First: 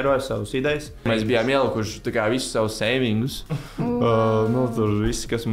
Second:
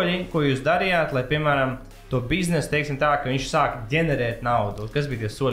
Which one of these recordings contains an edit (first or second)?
first